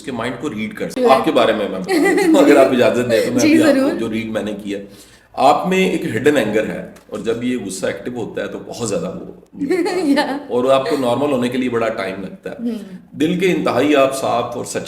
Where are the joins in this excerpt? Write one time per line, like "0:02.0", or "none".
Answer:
0:01.0